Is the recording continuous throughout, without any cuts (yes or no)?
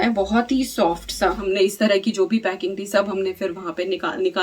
no